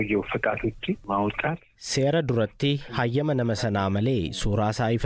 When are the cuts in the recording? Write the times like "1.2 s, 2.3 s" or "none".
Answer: none